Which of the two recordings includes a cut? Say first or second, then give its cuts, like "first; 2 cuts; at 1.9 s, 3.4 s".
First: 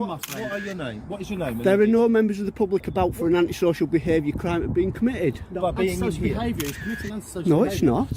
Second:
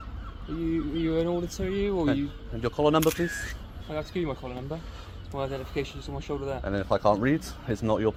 first; 1 cut; at 2.3 s